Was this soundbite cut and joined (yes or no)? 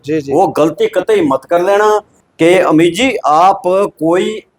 yes